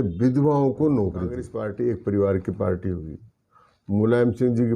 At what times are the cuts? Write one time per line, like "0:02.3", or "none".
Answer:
0:01.5